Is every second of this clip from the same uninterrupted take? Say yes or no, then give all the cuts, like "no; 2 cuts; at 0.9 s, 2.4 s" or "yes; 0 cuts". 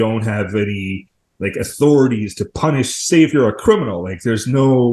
yes; 0 cuts